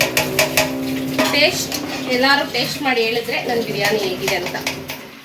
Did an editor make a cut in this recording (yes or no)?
no